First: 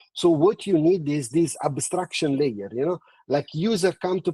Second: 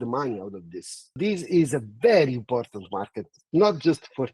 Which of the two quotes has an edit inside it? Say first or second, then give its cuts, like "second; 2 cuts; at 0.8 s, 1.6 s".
second; 1 cut; at 1.2 s